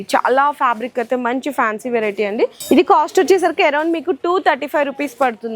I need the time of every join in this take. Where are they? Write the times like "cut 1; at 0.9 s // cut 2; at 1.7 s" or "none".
none